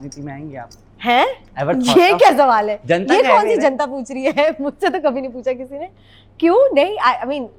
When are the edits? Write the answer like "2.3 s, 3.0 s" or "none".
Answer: none